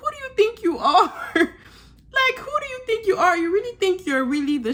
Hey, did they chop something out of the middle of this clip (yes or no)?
no